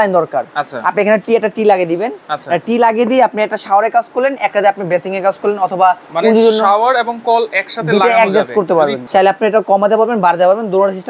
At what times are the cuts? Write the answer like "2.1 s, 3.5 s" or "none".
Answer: 9.0 s